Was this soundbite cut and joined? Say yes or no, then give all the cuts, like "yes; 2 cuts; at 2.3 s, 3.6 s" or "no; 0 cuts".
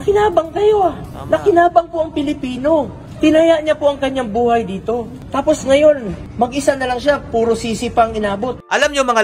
no; 0 cuts